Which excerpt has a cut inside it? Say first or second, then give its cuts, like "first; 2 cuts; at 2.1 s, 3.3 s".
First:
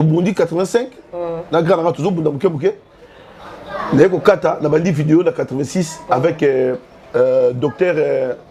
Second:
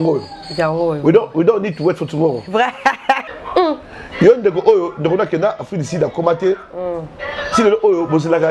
second; 1 cut; at 3.2 s